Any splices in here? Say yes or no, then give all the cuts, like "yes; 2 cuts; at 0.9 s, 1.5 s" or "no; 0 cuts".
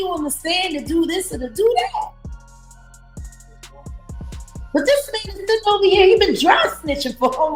no; 0 cuts